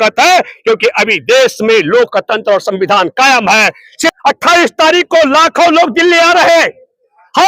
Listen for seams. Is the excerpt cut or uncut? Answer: cut